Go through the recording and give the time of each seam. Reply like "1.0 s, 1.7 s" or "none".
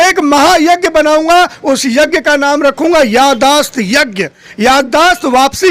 none